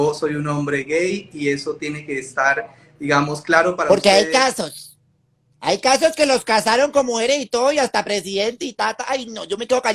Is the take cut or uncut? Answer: uncut